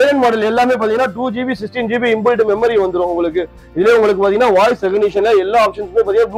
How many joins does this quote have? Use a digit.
1